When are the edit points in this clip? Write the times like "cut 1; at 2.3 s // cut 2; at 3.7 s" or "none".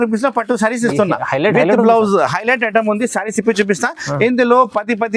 none